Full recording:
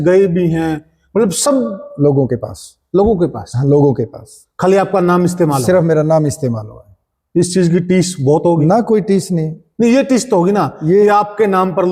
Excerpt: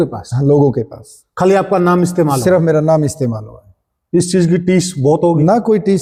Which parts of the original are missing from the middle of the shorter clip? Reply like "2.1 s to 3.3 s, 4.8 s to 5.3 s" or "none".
none